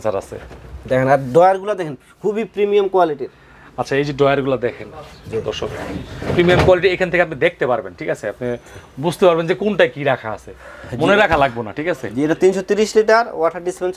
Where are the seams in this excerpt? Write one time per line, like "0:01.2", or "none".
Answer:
none